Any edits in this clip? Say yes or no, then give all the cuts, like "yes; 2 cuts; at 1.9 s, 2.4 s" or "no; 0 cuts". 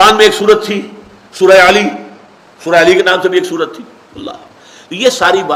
no; 0 cuts